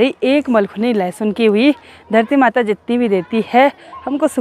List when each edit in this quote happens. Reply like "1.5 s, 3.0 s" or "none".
none